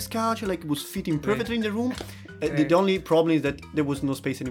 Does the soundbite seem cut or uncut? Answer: uncut